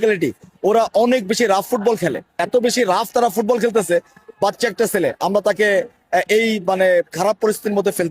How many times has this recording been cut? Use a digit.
1